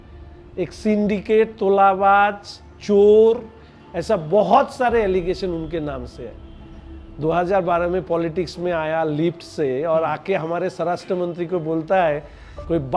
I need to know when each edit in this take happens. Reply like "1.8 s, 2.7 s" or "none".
none